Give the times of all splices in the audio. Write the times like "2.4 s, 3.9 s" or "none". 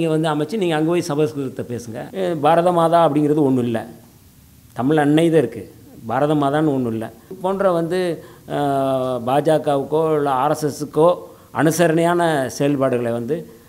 2.0 s, 7.4 s